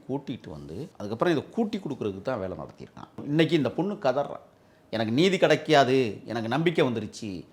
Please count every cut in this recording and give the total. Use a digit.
2